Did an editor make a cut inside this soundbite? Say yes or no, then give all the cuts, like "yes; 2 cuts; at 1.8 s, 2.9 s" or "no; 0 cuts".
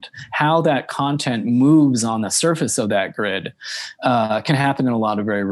no; 0 cuts